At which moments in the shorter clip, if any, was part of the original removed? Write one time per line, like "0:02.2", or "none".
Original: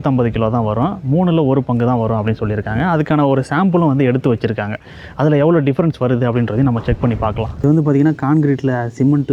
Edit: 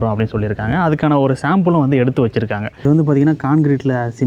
0:02.7